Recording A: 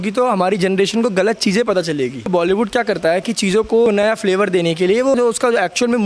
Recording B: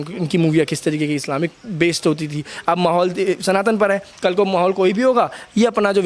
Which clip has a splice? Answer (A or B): A